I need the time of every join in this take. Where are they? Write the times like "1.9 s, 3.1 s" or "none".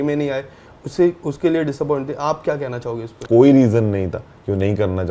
3.2 s